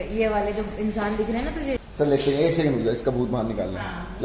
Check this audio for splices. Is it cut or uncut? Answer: cut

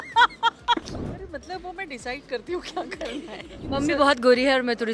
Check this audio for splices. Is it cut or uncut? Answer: cut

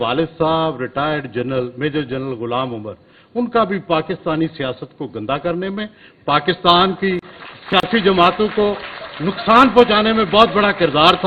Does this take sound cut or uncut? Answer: uncut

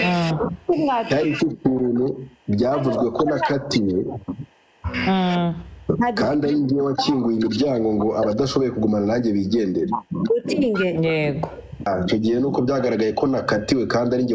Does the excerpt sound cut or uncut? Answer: cut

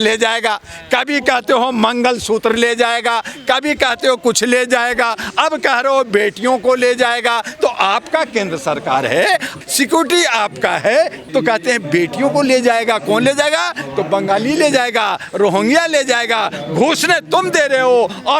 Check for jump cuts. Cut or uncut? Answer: cut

